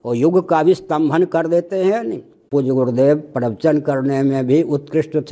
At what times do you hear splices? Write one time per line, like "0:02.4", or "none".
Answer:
0:02.5